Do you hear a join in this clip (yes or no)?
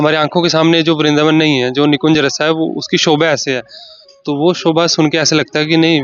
no